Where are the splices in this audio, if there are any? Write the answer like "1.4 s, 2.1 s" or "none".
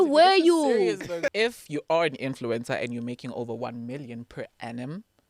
1.2 s